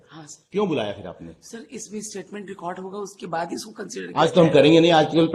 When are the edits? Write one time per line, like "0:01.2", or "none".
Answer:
none